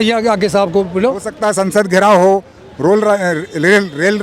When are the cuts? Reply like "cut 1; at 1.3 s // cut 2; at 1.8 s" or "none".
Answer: cut 1; at 1.3 s

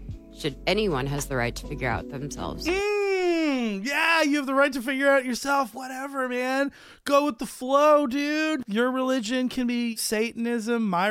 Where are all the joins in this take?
cut 1; at 8.6 s // cut 2; at 10.0 s

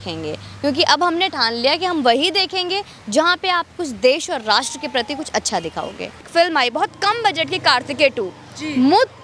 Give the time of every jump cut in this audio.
cut 1; at 6.2 s

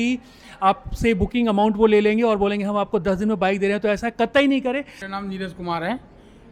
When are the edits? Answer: cut 1; at 5.0 s

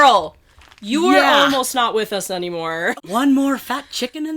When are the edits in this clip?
cut 1; at 2.9 s

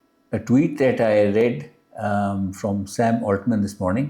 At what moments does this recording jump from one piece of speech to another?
none

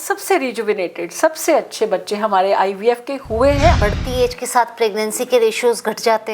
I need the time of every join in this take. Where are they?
cut 1; at 3.8 s

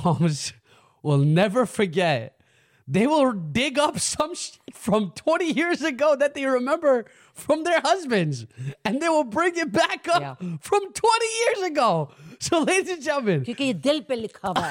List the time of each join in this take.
none

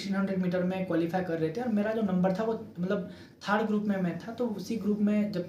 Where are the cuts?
none

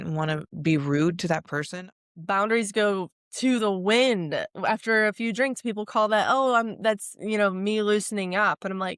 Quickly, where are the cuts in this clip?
cut 1; at 1.6 s // cut 2; at 3.2 s

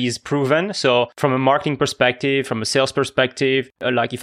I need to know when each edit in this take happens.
cut 1; at 1.1 s

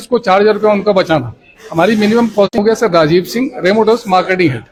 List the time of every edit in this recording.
none

